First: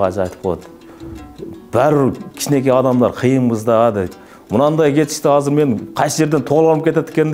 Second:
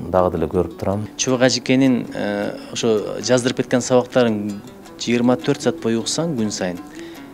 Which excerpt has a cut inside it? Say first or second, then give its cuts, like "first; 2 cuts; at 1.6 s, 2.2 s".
second; 1 cut; at 1.1 s